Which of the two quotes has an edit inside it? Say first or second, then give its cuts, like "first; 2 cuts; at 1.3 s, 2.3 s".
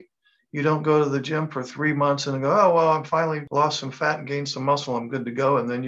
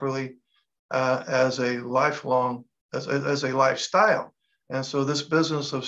first; 1 cut; at 3.4 s